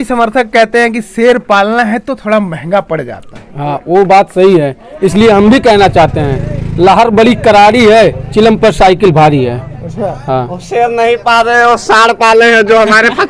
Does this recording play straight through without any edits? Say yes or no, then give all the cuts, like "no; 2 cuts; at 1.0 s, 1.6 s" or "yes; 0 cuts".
yes; 0 cuts